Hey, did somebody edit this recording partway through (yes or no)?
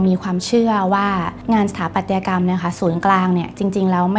yes